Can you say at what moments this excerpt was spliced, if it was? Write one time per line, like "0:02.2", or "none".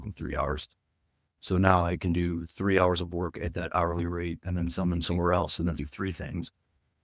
none